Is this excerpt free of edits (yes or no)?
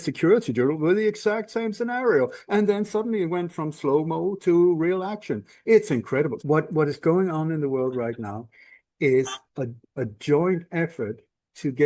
no